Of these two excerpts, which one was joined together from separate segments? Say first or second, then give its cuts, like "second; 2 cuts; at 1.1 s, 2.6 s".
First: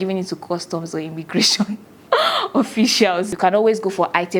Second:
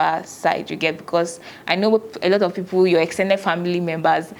first; 1 cut; at 3.3 s